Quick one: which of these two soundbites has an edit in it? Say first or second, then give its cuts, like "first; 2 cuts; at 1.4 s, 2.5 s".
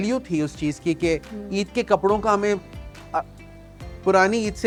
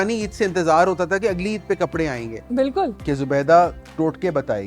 second; 1 cut; at 3.0 s